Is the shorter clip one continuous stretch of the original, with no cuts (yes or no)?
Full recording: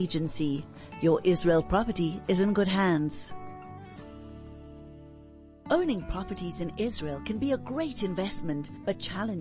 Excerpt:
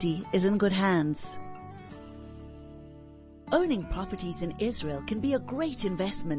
no